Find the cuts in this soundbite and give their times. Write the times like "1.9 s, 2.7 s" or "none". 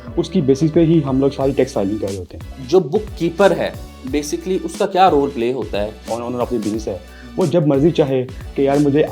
2.6 s, 6.1 s